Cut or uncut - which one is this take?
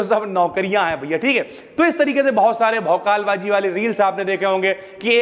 uncut